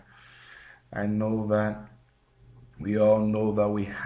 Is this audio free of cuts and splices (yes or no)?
no